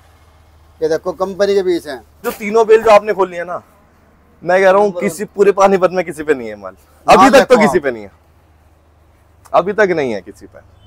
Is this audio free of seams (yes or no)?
no